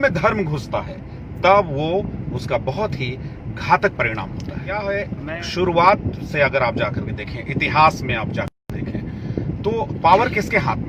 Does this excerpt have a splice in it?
no; 0 cuts

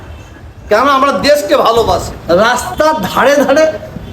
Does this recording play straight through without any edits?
no; 1 cut; at 2.1 s

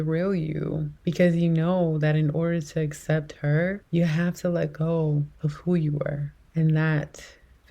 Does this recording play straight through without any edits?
no; 1 cut; at 0.9 s

